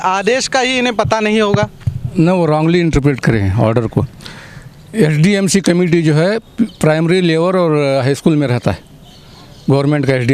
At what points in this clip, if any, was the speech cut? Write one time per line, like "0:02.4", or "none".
none